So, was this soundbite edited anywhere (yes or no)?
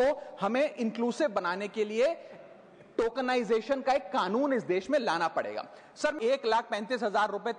yes